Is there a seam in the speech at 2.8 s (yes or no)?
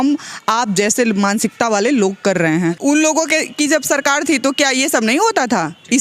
yes